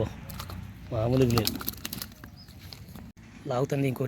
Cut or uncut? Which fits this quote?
cut